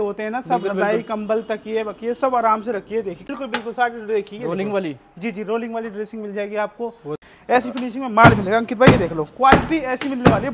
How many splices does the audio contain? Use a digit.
2